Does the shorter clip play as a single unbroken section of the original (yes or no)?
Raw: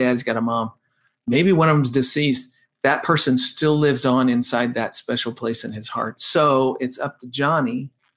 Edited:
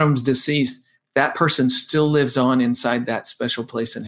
yes